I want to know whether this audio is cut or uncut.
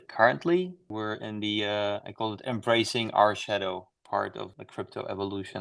cut